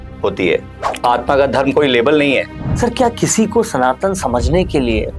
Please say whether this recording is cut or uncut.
cut